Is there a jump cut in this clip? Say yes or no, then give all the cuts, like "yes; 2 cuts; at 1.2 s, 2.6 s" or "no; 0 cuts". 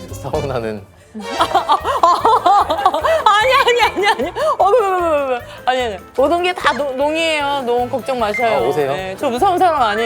yes; 2 cuts; at 6.0 s, 9.1 s